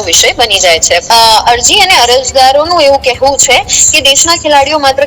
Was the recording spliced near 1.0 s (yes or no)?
yes